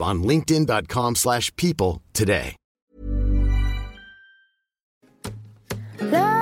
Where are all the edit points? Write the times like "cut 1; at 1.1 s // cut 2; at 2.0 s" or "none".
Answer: cut 1; at 4.9 s